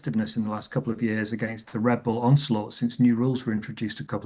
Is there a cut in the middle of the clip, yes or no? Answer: yes